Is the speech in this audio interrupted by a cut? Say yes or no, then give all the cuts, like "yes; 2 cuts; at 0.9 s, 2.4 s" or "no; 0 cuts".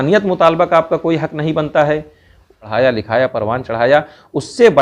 yes; 1 cut; at 2.7 s